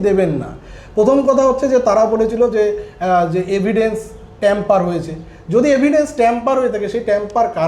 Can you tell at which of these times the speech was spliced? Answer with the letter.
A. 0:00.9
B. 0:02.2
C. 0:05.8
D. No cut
D